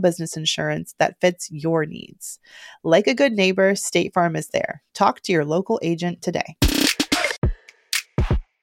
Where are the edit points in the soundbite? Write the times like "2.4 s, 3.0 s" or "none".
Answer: 7.4 s